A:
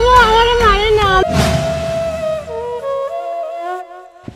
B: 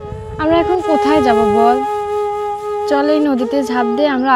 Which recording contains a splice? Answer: A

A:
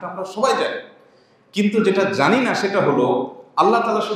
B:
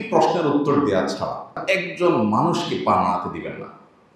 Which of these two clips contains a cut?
B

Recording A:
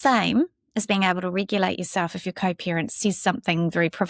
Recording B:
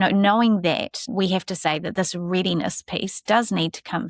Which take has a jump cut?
B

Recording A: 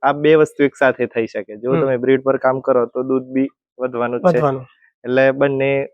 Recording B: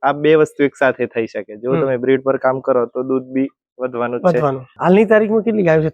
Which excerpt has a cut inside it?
B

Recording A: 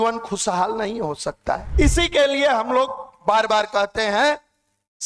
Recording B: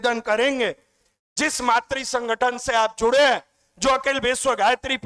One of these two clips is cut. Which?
A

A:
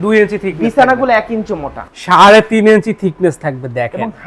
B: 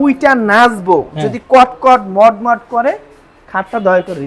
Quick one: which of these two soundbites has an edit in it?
A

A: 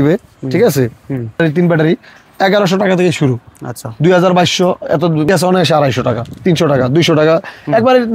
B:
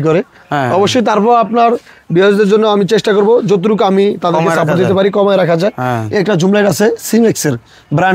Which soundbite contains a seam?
A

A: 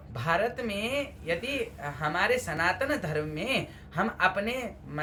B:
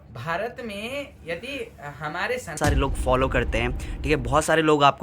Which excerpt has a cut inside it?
B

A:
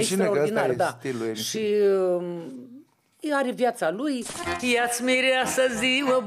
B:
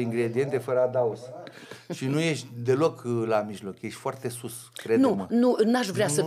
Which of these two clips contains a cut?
A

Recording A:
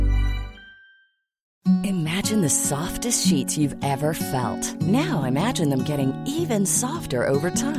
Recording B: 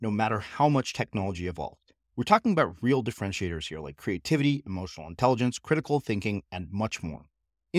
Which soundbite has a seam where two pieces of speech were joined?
A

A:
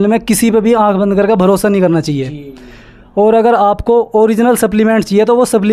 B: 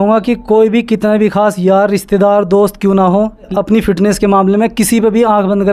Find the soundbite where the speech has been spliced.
B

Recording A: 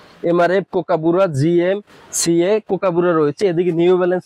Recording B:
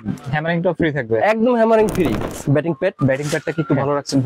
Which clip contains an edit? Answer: B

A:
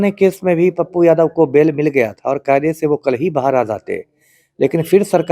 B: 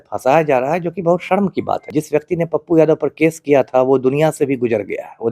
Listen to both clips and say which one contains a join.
B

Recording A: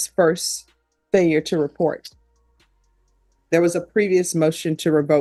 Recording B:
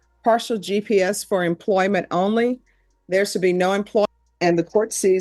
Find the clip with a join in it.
B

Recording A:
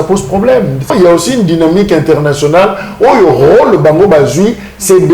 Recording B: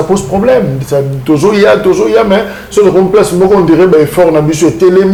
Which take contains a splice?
A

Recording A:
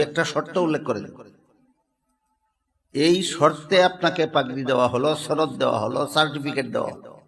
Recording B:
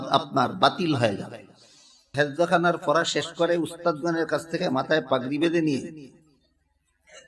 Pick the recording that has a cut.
B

